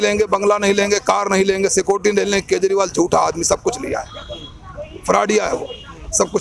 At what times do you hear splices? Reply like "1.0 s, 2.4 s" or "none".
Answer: none